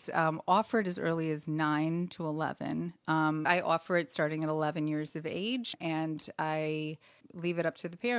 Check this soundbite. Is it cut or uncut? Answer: cut